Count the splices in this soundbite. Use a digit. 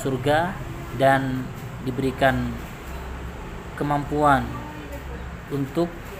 0